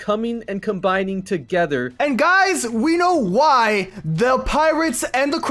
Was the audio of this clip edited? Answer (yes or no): no